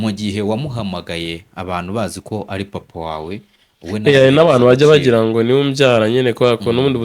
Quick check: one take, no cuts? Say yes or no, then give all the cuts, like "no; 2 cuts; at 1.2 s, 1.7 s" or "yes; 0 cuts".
yes; 0 cuts